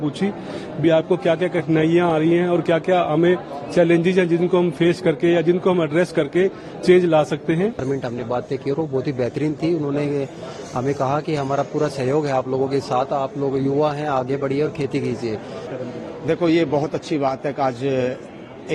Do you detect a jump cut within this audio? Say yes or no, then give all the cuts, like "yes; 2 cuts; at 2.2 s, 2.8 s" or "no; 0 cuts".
yes; 2 cuts; at 7.8 s, 15.6 s